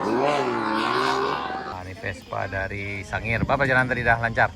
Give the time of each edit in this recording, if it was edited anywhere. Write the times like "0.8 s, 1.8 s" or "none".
1.7 s